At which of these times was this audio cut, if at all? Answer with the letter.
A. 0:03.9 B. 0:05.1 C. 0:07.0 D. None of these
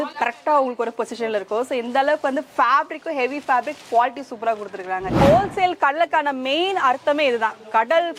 B